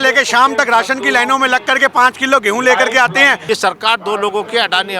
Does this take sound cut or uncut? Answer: cut